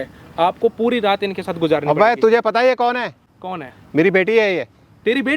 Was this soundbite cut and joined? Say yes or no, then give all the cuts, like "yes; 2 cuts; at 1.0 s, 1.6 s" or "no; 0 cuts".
yes; 1 cut; at 3.3 s